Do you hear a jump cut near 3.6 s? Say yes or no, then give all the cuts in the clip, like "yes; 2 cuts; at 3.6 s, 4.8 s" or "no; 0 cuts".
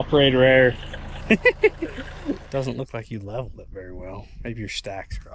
no; 2 cuts; at 1.1 s, 2.4 s